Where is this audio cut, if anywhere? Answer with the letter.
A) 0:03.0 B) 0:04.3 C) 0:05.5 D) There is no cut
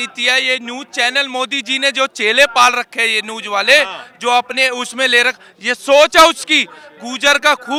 D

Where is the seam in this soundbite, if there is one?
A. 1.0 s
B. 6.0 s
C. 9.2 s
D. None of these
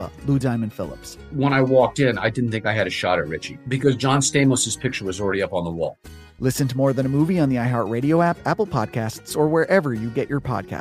D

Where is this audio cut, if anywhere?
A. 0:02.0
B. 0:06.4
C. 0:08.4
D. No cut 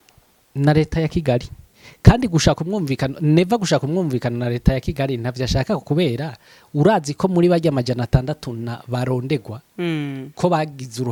D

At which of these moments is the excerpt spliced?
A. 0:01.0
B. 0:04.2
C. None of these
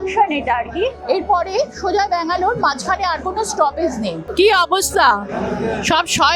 B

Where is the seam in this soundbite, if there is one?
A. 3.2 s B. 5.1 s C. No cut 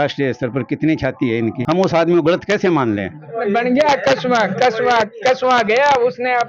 A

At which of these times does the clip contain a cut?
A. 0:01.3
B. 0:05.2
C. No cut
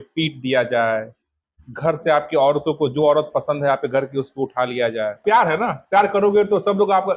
B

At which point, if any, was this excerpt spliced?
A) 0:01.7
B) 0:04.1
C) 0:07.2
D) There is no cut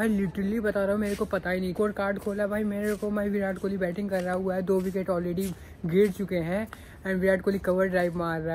A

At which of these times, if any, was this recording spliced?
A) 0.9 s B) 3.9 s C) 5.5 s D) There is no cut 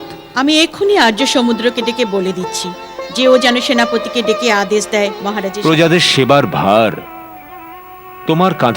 C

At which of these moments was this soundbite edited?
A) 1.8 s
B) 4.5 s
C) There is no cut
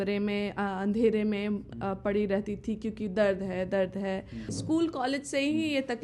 B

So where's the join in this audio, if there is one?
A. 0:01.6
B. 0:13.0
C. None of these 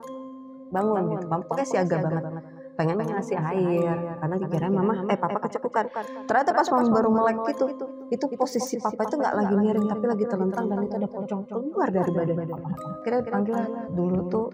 B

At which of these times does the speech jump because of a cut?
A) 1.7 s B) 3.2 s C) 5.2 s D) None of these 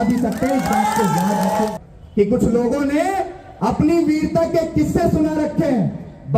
A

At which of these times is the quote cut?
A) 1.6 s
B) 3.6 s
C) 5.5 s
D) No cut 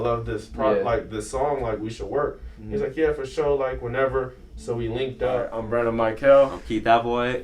C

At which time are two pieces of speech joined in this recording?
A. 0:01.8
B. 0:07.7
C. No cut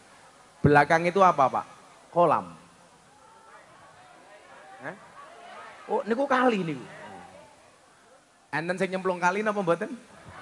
C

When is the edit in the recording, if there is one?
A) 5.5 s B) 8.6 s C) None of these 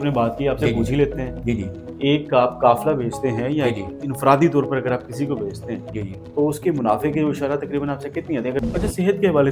B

